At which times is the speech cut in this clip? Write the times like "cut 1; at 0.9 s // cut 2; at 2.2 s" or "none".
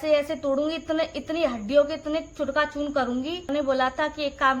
cut 1; at 3.5 s